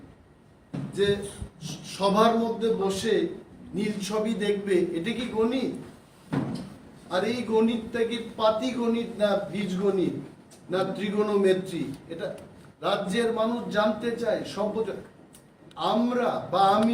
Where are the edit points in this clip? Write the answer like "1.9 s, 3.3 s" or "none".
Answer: 14.2 s